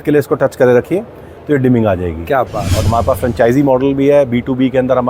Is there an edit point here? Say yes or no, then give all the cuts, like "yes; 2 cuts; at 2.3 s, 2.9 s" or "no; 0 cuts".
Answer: yes; 1 cut; at 2.8 s